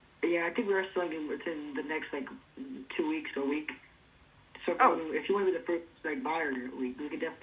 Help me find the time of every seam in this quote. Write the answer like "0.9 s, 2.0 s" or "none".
none